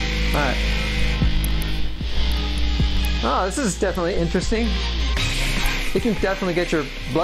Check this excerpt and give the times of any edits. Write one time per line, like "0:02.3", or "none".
none